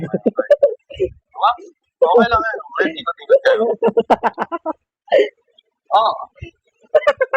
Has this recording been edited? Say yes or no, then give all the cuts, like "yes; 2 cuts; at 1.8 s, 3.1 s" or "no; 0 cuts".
no; 0 cuts